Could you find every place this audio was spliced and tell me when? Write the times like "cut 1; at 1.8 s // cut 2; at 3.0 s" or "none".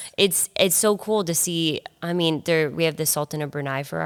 none